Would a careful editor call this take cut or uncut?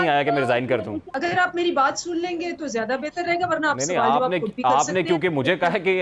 cut